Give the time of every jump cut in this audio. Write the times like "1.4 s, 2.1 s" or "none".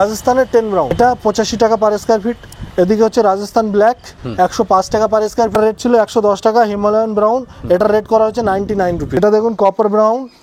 0.9 s, 5.5 s, 9.2 s